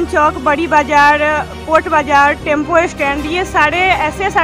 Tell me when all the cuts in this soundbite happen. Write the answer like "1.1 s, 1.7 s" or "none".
none

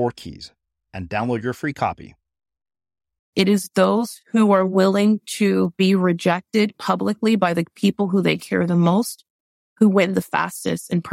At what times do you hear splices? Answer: 3.3 s

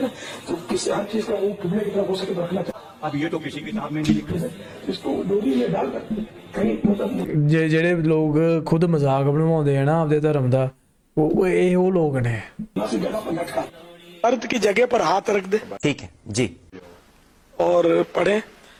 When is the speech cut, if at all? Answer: none

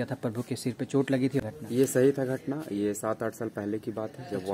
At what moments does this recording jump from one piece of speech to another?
1.4 s

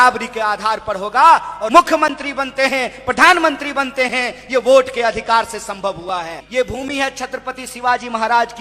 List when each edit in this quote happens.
1.6 s, 6.4 s

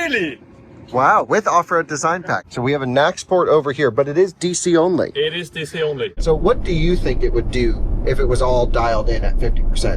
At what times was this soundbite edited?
2.3 s, 6.2 s

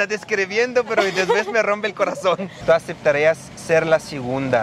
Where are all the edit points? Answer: 2.5 s

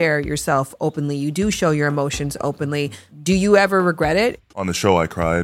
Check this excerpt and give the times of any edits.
3.1 s, 4.4 s

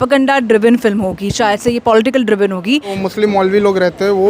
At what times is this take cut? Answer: 3.0 s

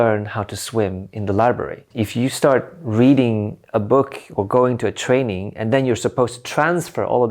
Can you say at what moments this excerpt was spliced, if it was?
1.9 s

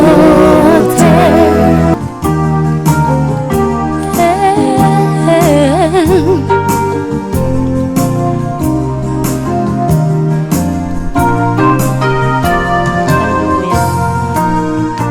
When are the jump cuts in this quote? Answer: 1.9 s

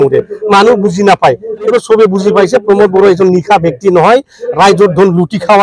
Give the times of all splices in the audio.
1.7 s

